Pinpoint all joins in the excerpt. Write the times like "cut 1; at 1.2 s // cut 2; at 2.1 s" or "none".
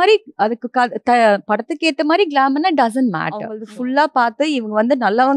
cut 1; at 3.6 s